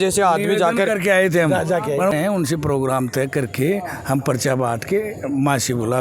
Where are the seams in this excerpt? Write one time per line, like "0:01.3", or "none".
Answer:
0:02.1